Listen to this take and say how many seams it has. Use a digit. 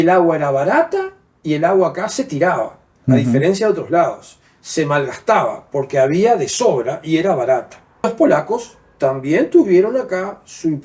1